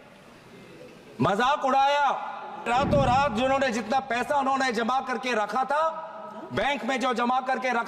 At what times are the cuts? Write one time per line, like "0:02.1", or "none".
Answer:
0:02.7